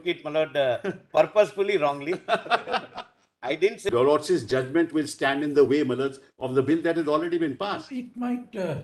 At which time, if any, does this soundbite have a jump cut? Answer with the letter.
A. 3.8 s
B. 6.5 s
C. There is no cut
A